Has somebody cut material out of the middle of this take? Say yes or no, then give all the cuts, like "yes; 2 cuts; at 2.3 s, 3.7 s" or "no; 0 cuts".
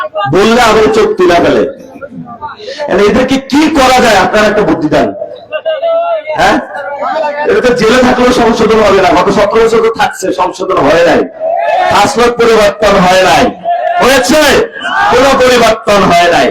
no; 0 cuts